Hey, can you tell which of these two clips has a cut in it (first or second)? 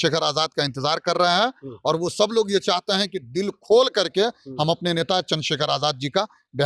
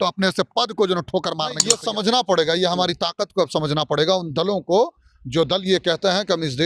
second